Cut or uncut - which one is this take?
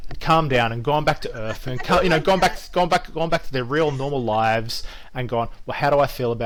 uncut